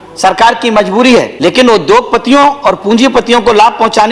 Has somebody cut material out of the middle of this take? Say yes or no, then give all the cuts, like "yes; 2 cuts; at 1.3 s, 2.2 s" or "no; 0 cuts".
yes; 1 cut; at 1.3 s